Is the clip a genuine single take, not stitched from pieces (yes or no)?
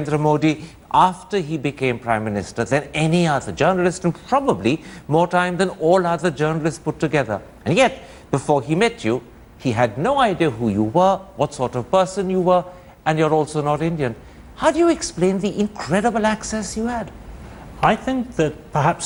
yes